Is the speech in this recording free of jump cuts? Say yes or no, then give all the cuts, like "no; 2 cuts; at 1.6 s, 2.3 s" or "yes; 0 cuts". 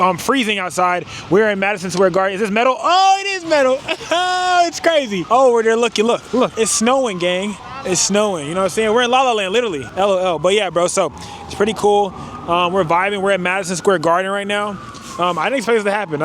no; 4 cuts; at 5.2 s, 6.5 s, 7.7 s, 9.8 s